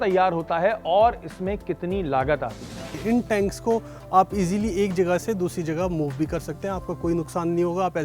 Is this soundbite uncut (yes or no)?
no